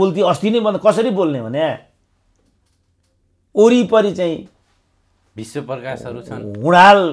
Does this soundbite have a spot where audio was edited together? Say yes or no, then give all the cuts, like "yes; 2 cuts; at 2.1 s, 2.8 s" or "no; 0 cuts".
no; 0 cuts